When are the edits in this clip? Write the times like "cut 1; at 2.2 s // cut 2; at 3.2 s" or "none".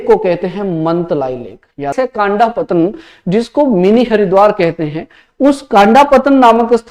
cut 1; at 1.9 s